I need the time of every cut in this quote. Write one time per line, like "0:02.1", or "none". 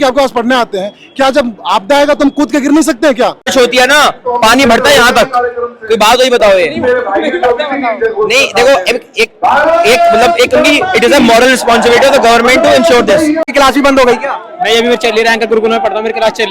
0:03.4
0:13.4

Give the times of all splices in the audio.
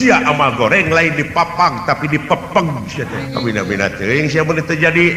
0:03.2

